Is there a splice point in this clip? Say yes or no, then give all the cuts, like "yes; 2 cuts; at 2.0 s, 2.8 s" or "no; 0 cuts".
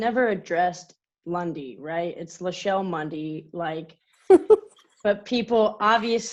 no; 0 cuts